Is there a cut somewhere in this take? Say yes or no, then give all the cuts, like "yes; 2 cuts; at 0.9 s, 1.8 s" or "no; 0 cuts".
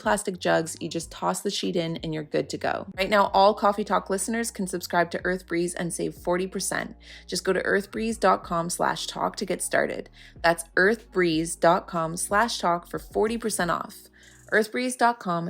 yes; 1 cut; at 3.0 s